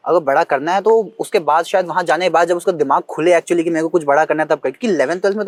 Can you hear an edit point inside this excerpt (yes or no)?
no